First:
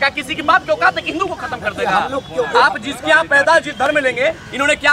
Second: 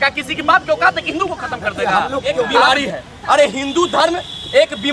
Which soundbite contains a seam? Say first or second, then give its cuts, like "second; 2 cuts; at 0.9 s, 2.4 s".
second; 1 cut; at 2.7 s